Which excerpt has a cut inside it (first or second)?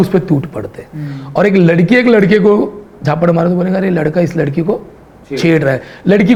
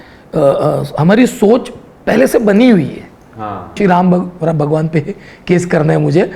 second